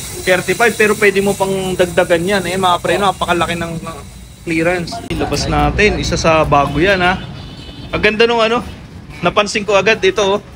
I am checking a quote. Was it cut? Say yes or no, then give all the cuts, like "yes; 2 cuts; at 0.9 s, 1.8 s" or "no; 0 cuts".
yes; 1 cut; at 5.1 s